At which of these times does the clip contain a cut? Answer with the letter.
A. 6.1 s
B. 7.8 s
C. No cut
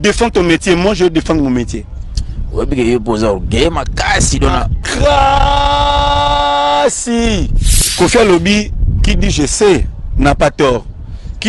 B